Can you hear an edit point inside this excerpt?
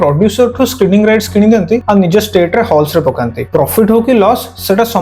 yes; 2 cuts; at 1.8 s, 3.4 s

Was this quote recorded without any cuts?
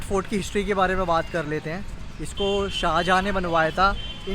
yes; 0 cuts

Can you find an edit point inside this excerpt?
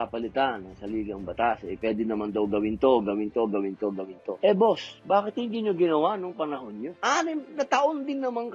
yes; 2 cuts; at 4.2 s, 6.9 s

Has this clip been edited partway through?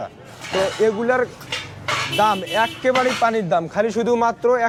no; 0 cuts

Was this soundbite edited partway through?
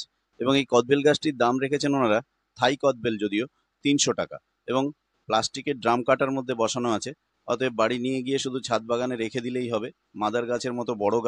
no; 0 cuts

